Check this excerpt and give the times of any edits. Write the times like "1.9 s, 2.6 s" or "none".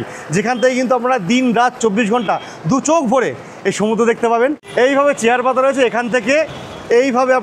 4.6 s

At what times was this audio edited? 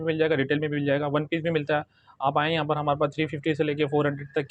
none

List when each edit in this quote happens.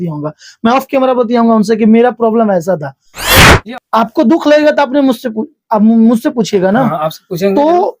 3.5 s

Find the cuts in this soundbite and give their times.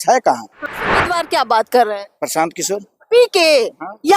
1.0 s

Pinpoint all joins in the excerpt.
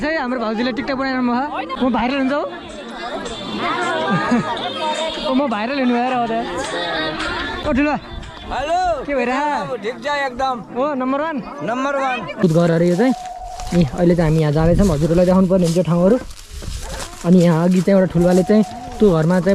1.7 s, 7.6 s, 12.4 s

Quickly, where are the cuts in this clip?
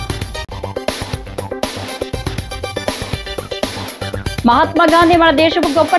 3.2 s

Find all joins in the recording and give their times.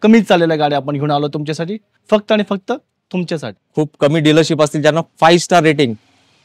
3.6 s

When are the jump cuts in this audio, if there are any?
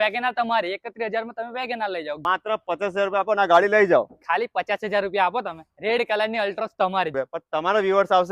2.2 s, 7.1 s

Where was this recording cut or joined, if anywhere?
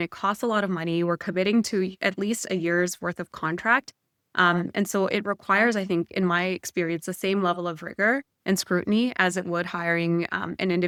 none

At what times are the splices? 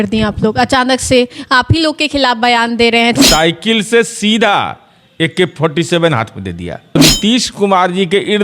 3.2 s, 7.0 s

